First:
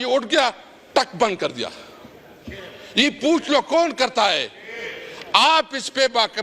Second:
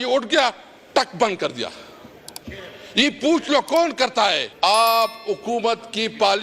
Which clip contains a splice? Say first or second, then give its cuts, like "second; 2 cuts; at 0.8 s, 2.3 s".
second; 1 cut; at 4.5 s